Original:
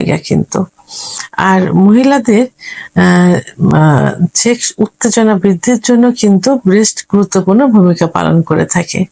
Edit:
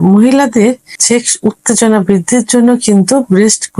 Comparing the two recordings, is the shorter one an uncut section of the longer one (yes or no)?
no